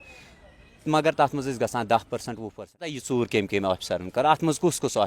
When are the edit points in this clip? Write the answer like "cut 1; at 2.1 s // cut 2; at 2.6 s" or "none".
cut 1; at 3.0 s